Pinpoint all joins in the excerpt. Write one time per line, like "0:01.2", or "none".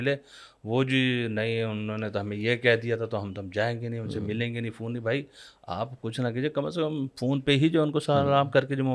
none